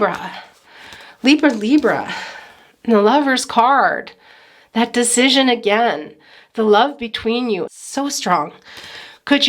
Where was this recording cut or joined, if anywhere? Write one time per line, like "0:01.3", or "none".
0:07.7